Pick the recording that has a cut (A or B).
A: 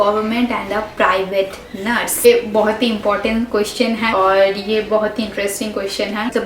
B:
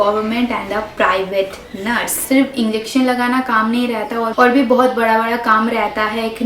B